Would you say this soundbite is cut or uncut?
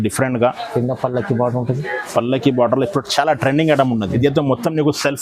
cut